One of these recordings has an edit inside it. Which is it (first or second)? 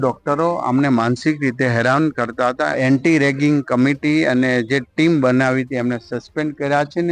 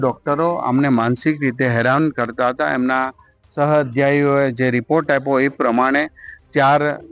first